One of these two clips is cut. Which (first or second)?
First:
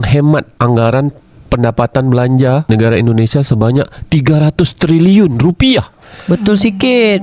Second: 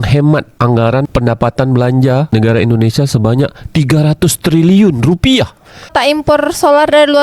second